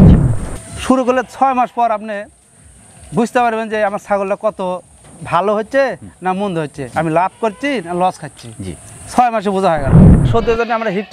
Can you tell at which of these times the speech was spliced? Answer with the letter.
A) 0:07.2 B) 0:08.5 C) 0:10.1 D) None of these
C